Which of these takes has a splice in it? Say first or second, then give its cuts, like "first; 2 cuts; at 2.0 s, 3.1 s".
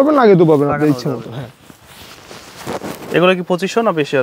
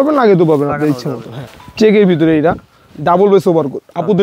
second; 1 cut; at 1.6 s